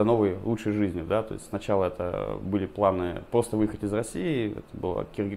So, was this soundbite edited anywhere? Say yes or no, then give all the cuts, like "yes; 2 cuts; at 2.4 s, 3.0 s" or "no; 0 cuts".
no; 0 cuts